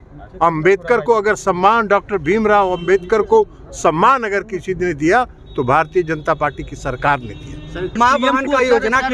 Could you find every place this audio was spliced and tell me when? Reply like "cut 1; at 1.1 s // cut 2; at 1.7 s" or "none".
cut 1; at 7.9 s